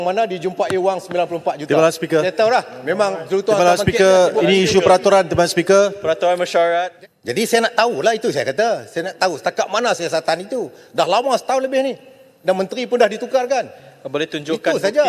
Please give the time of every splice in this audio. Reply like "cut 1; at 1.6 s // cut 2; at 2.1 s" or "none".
cut 1; at 6.9 s